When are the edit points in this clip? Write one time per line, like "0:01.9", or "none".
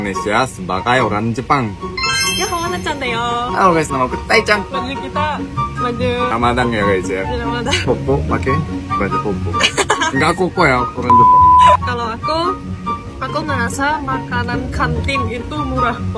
none